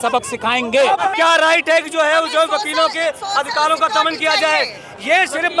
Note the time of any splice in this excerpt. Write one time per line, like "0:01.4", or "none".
0:01.1

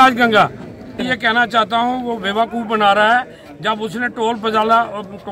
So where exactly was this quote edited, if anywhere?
0:01.1

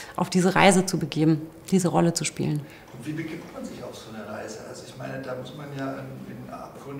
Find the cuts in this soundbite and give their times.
none

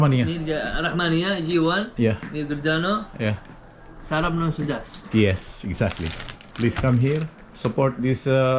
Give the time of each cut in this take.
none

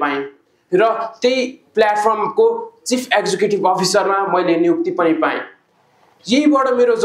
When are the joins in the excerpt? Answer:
none

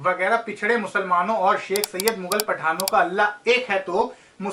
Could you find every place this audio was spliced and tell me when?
none

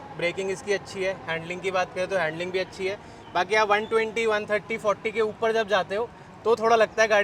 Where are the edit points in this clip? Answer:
none

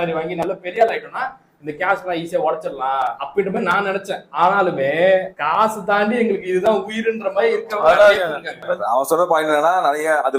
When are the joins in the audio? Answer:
none

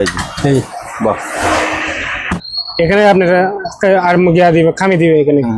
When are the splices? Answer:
0:02.4

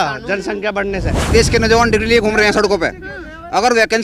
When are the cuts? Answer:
0:01.3

